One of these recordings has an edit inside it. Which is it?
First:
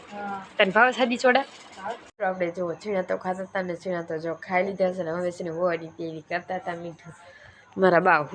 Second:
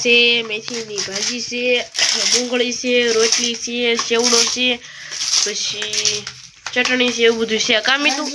first; 1 cut; at 2.1 s

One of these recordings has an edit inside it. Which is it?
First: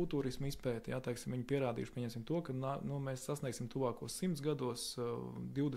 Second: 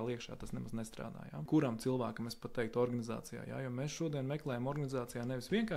second; 1 cut; at 1.5 s

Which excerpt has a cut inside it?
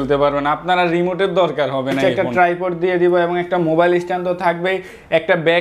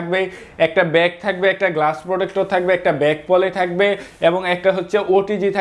first; 1 cut; at 2.0 s

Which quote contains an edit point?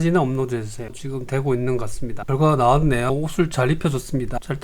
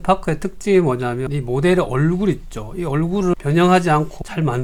first; 2 cuts; at 0.9 s, 2.1 s

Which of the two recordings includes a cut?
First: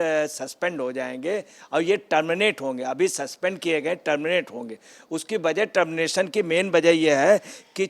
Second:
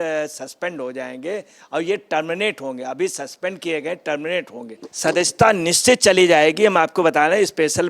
second; 1 cut; at 4.9 s

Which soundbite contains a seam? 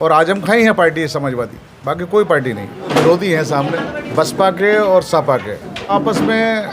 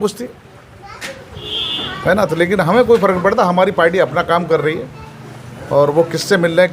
first; 3 cuts; at 2.9 s, 4.0 s, 5.9 s

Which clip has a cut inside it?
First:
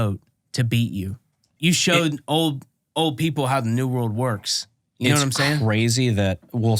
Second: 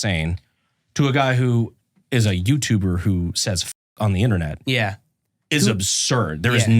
first; 1 cut; at 1.5 s

